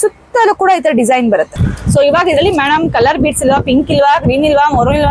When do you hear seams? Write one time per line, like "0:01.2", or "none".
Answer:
0:01.7